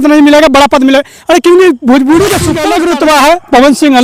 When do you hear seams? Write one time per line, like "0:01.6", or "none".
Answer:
0:02.6